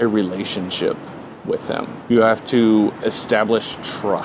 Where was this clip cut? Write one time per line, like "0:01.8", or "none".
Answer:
0:02.0